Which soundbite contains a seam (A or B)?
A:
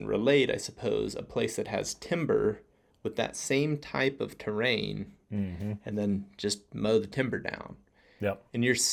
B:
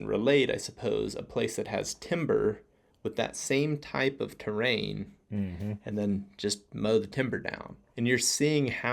B